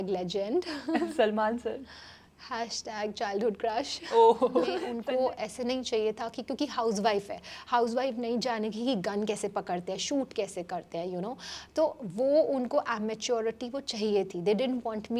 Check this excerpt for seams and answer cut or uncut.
cut